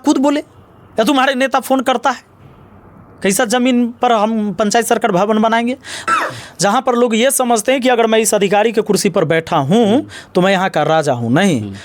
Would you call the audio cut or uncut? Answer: cut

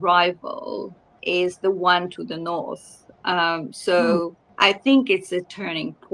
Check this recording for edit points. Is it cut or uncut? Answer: cut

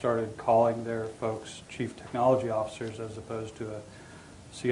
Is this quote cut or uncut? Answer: cut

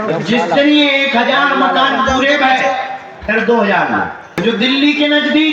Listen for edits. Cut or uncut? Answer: cut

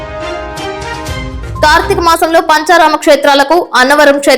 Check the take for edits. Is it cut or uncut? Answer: cut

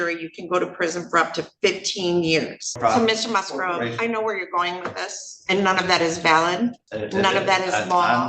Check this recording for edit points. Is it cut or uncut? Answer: cut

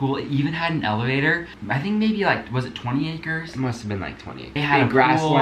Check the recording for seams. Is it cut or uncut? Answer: cut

